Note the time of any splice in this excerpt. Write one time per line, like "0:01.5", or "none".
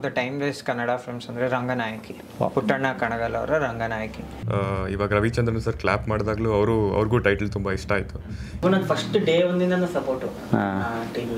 0:04.3
0:08.6